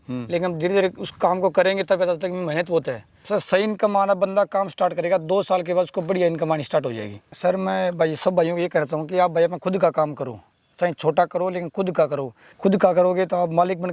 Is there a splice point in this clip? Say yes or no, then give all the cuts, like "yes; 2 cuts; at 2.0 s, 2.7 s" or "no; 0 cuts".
yes; 3 cuts; at 3.1 s, 7.3 s, 12.4 s